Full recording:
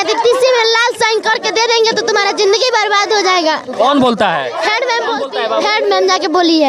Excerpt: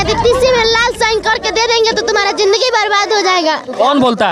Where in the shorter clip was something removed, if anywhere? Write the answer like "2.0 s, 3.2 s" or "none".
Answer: none